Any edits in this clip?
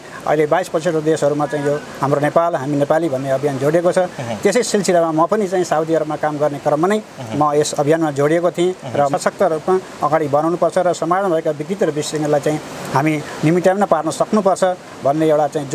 yes; 1 cut; at 9.1 s

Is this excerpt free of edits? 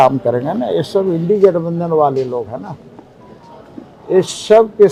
yes; 0 cuts

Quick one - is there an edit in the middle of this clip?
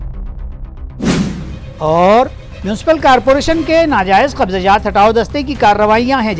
yes; 1 cut; at 1.1 s

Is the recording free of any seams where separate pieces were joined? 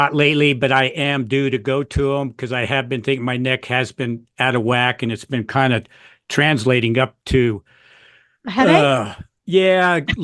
yes; 0 cuts

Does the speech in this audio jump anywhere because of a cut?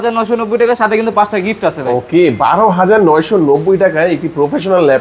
no; 0 cuts

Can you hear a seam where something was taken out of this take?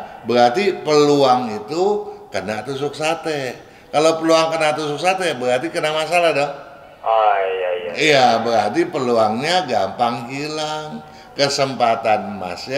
no; 0 cuts

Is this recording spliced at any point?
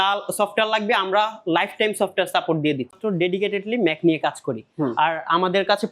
yes; 1 cut; at 3.0 s

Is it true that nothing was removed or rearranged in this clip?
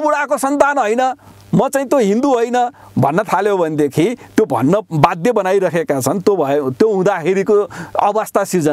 yes; 0 cuts

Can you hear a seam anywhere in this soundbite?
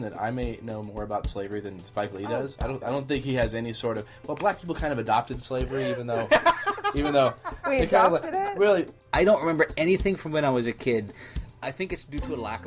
yes; 1 cut; at 9.0 s

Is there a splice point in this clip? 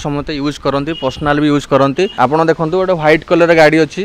yes; 1 cut; at 2.1 s

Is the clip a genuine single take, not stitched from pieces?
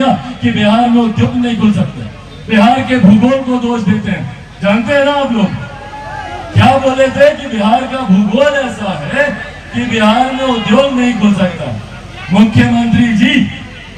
yes; 0 cuts

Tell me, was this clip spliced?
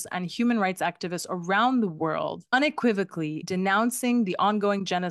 yes; 2 cuts; at 2.4 s, 3.4 s

